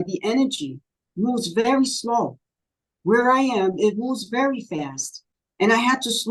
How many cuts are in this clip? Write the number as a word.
zero